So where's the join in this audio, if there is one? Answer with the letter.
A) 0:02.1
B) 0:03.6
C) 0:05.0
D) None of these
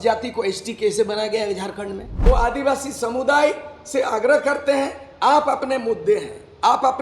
A